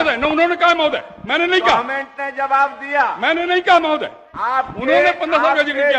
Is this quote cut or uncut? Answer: uncut